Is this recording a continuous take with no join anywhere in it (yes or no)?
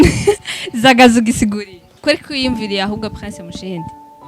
no